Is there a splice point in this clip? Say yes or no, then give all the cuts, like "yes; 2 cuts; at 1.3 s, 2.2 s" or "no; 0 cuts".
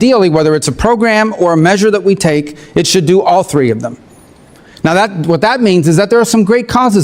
no; 0 cuts